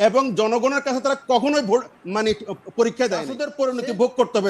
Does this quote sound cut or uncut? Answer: cut